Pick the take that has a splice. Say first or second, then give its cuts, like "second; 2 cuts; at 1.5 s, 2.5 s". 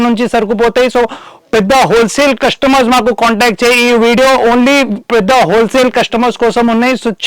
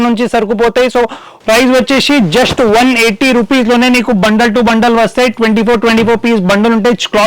second; 1 cut; at 1.3 s